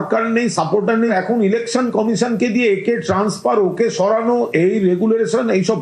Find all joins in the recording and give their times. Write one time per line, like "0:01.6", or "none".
none